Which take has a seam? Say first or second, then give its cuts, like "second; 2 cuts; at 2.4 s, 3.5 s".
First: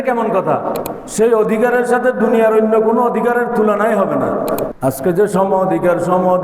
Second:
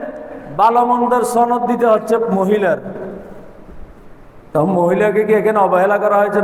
first; 2 cuts; at 1.0 s, 4.7 s